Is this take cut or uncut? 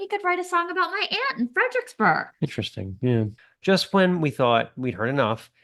cut